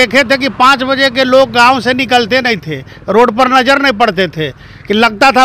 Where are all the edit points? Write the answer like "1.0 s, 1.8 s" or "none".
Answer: none